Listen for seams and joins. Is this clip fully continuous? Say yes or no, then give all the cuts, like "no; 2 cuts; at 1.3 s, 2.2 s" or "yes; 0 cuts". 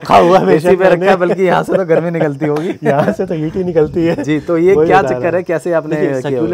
yes; 0 cuts